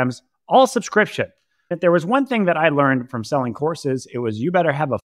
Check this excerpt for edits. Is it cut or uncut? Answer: cut